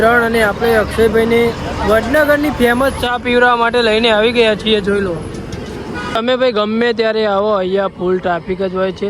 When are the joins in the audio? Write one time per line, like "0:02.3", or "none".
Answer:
0:01.7
0:06.1